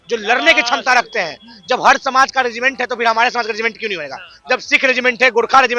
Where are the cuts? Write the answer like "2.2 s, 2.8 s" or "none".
none